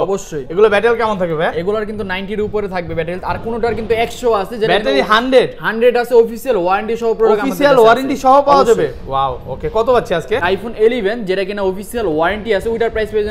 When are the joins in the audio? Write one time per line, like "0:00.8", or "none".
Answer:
0:10.4